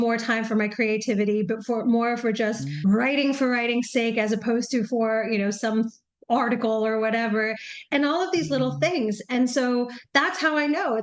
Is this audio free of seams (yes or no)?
yes